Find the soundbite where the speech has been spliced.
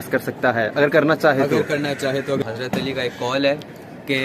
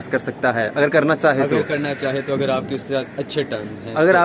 first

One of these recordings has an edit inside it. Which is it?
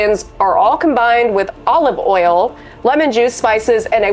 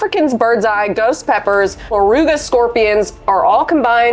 second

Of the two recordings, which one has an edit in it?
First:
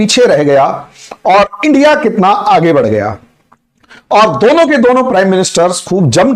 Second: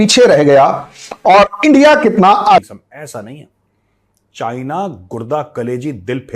second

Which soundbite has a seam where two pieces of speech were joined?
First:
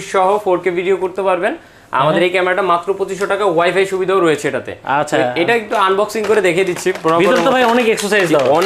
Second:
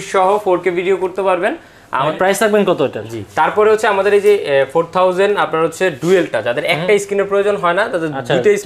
second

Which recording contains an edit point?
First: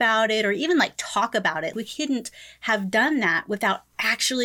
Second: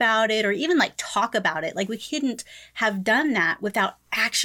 first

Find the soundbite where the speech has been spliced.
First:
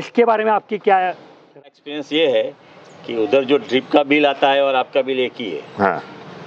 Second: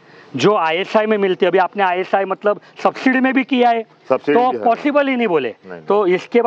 first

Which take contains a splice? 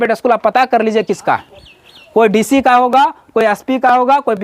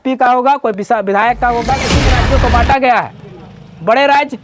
second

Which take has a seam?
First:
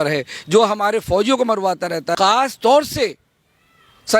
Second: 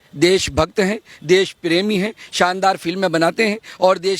first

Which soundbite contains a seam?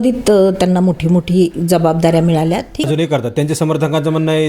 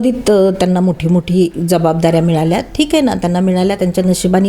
first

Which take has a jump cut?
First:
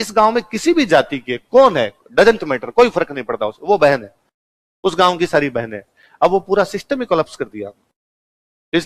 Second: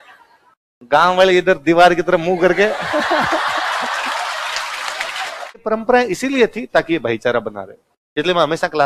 second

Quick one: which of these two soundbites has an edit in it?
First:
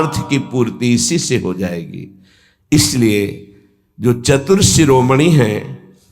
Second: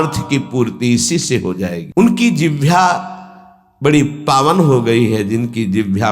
second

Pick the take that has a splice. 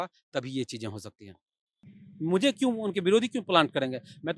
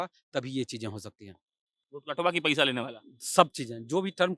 first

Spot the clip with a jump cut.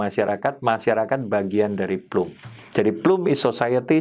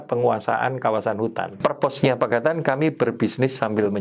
second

